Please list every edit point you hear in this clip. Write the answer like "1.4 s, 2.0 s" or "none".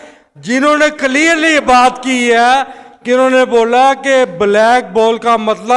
none